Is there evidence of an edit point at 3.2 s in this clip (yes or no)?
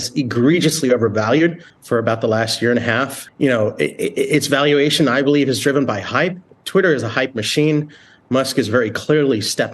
yes